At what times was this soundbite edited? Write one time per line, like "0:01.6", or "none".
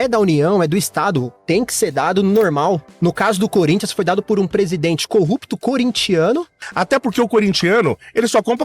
0:06.6